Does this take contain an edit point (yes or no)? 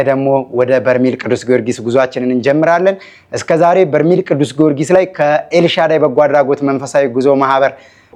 no